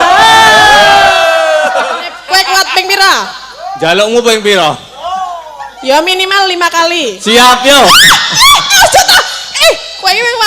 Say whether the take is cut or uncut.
cut